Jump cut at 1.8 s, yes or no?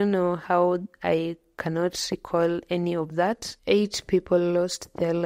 no